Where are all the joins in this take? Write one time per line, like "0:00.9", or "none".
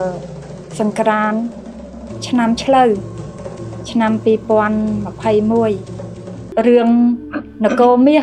0:06.4